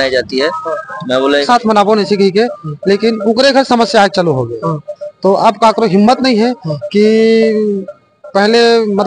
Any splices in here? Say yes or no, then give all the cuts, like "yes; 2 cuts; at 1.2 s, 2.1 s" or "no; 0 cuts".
yes; 1 cut; at 1.4 s